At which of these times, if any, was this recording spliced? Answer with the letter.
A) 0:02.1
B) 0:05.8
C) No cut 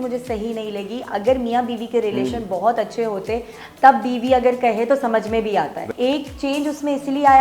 B